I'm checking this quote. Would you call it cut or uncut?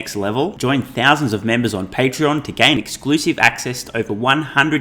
uncut